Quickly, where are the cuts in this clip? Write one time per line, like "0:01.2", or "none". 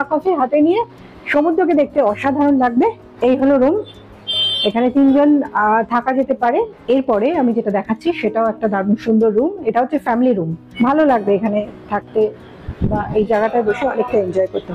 0:03.1
0:06.8
0:10.6

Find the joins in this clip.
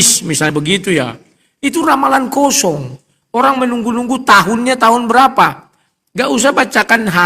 none

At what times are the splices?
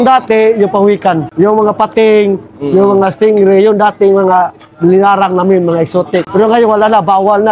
0:01.3
0:06.3

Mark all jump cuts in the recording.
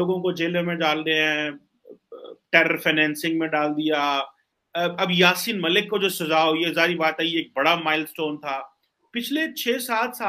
none

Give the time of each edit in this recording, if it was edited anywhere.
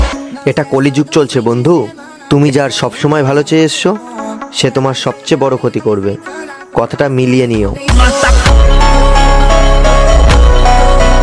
none

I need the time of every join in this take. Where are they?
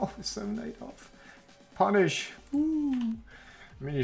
0:02.3

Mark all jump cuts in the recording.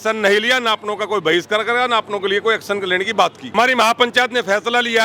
0:03.5

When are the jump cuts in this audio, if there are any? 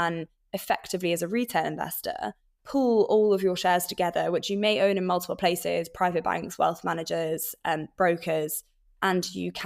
none

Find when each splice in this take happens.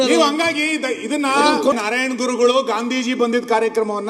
0:01.8

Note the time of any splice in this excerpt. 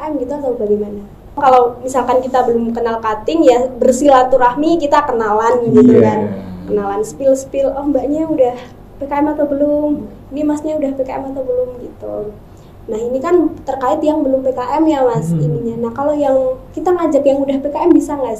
0:01.4

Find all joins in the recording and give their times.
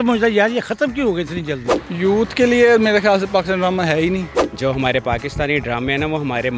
0:01.5
0:04.3

